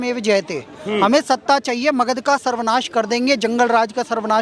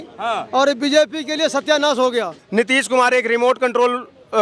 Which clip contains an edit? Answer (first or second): second